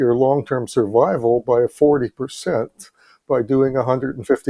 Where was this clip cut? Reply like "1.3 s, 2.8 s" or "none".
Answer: none